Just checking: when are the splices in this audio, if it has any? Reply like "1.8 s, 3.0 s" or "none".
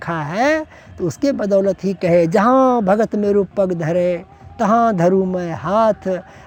none